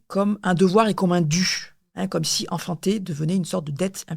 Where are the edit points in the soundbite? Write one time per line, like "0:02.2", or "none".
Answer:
none